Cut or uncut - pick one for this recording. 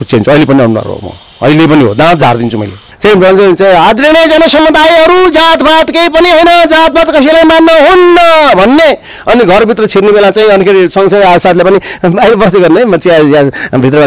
cut